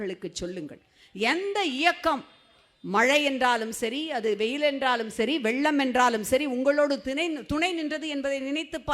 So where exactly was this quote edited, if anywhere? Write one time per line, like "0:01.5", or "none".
none